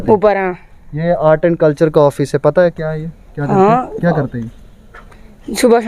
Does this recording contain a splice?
no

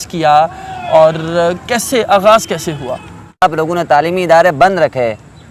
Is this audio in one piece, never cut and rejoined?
no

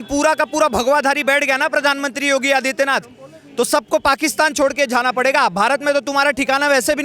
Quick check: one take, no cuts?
yes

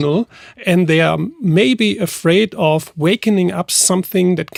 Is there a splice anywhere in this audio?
no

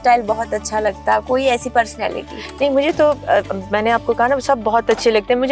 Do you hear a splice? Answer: no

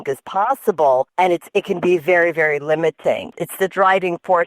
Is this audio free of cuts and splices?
no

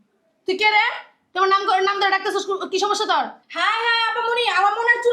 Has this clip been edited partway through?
yes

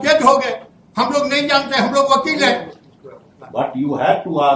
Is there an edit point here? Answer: no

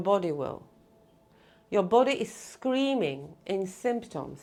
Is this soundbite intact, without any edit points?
yes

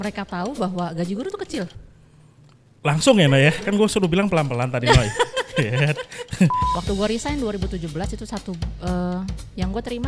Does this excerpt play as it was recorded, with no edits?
no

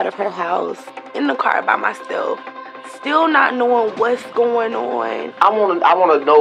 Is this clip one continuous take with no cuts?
no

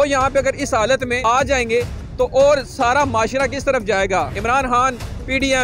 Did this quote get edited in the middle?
yes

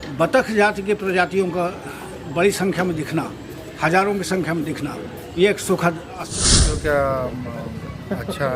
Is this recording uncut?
no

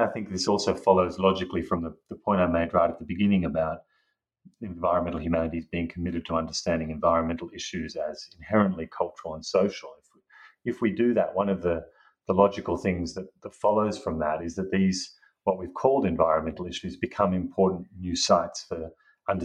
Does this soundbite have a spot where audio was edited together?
no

